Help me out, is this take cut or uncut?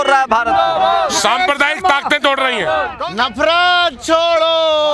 cut